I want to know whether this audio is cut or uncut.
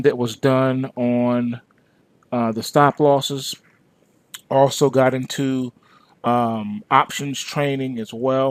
uncut